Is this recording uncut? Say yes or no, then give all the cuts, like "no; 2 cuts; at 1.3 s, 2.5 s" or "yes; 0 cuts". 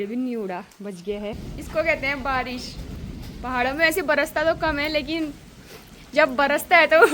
no; 1 cut; at 1.5 s